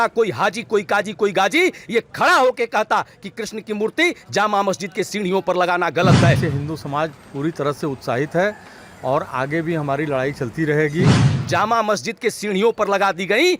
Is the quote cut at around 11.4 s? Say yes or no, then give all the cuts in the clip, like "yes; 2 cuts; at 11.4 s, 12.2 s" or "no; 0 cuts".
yes; 2 cuts; at 6.4 s, 11.4 s